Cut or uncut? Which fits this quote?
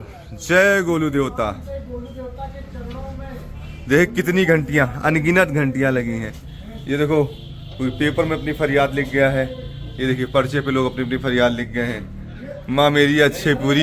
uncut